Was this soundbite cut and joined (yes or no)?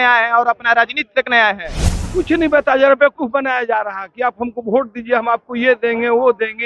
yes